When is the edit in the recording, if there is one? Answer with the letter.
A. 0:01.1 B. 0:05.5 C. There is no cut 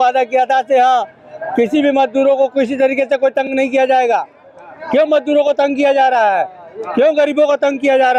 C